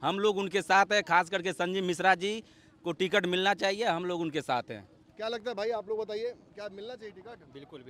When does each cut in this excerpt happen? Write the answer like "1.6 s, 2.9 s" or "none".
none